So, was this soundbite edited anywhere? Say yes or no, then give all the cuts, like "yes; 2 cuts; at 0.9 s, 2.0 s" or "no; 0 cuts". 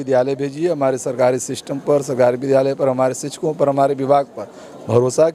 no; 0 cuts